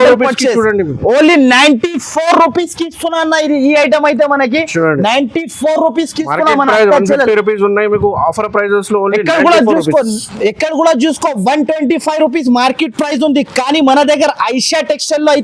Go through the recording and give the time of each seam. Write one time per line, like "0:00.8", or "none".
none

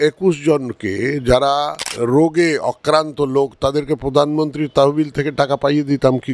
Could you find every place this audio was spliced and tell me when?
0:01.8

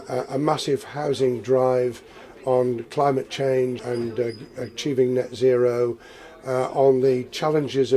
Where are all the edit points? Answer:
0:03.8

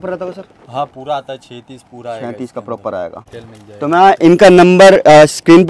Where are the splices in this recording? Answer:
0:03.3

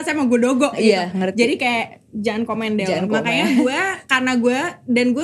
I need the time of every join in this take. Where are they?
none

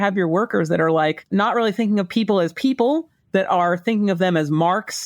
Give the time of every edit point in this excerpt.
0:01.2

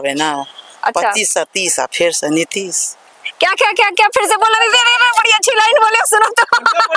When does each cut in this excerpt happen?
none

